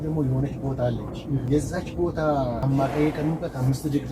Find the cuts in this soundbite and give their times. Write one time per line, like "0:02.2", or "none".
0:01.4
0:02.6